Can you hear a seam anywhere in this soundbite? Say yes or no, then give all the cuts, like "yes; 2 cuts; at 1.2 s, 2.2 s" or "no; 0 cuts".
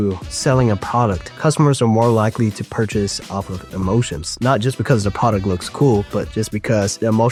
no; 0 cuts